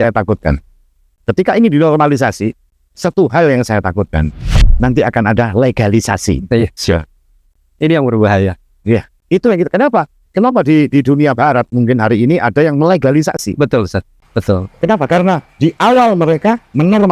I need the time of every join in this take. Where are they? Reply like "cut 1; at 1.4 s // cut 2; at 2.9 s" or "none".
cut 1; at 1.2 s